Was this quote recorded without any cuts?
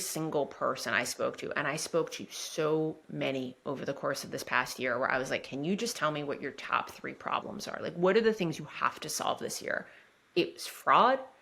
yes; 0 cuts

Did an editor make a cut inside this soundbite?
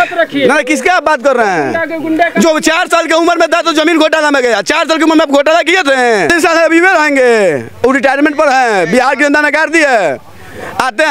yes; 1 cut; at 6.3 s

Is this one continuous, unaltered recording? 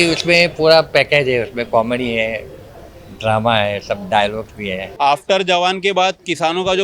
no; 1 cut; at 4.9 s

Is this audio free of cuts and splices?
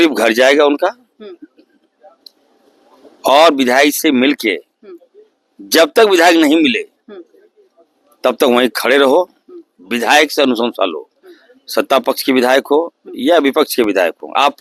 yes; 0 cuts

